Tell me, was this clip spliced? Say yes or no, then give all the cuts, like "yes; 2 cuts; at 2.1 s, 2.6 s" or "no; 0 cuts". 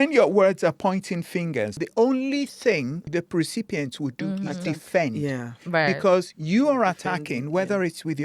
yes; 2 cuts; at 1.7 s, 3.0 s